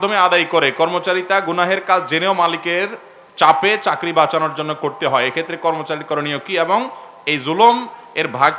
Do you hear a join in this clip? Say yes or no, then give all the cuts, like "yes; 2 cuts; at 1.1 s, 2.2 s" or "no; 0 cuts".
no; 0 cuts